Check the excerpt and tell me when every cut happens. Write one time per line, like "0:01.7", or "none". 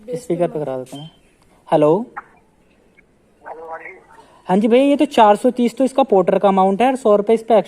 none

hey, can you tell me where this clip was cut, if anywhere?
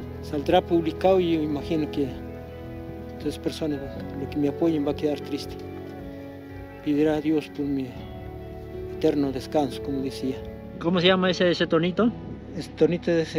0:10.7

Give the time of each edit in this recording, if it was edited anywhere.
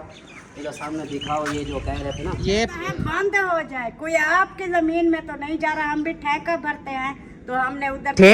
0:02.4

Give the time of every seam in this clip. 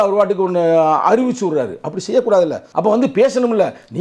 0:02.7

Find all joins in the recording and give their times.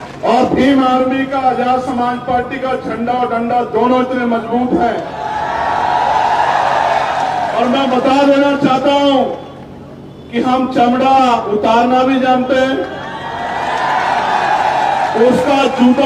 none

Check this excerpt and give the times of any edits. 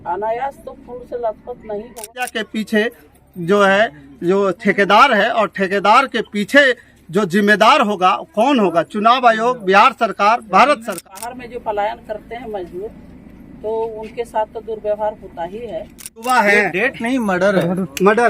0:02.3
0:11.0
0:16.1

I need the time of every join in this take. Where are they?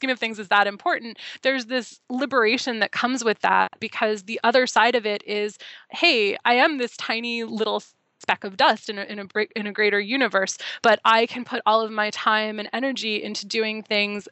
0:03.8

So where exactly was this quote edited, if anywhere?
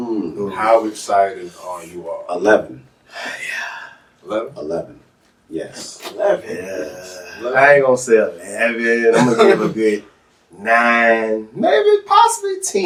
none

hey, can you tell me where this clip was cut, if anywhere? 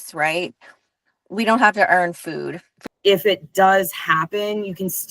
0:02.7

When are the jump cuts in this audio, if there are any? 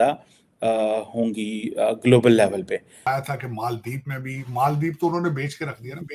0:03.1

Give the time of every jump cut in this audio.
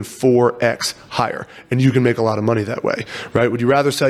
none

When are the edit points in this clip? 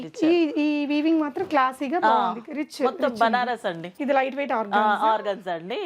0:03.9

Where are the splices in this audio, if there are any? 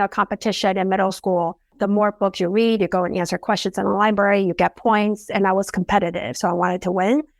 0:01.7
0:05.2

